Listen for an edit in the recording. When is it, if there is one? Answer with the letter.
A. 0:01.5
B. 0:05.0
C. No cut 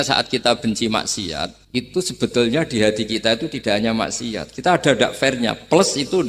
A